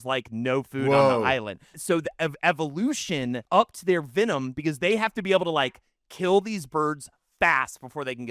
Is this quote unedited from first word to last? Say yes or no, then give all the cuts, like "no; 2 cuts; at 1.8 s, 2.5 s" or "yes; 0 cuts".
no; 2 cuts; at 1.7 s, 3.4 s